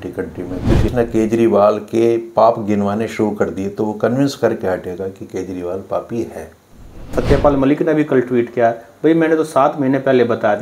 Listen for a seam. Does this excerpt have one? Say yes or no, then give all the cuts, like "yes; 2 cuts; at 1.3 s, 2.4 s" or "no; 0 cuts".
yes; 2 cuts; at 0.9 s, 7.1 s